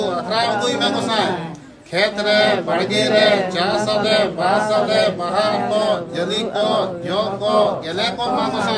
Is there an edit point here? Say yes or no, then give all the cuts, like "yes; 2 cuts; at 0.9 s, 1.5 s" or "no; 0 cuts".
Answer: no; 0 cuts